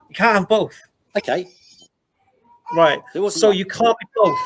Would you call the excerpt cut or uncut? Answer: cut